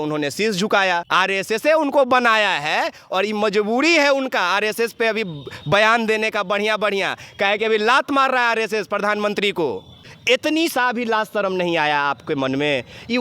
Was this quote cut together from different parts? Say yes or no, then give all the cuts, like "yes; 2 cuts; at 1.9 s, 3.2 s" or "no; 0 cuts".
yes; 2 cuts; at 1.1 s, 10.1 s